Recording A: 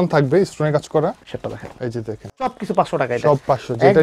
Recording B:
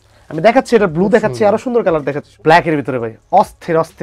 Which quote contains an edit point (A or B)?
A